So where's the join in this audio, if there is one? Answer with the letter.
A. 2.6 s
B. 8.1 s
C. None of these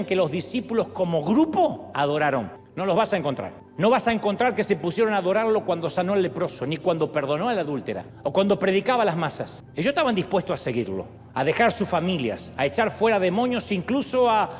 C